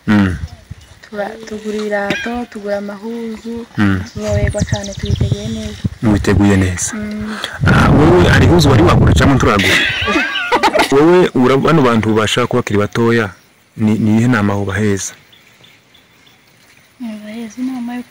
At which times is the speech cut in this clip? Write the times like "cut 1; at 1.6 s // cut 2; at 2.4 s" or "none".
cut 1; at 10.9 s

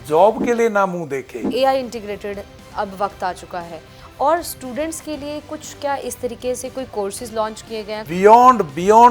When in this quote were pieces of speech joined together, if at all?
cut 1; at 1.4 s // cut 2; at 8.0 s

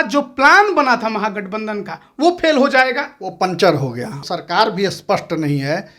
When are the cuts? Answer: cut 1; at 4.2 s

